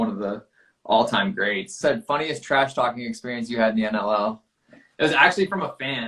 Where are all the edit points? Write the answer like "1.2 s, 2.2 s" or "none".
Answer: 1.7 s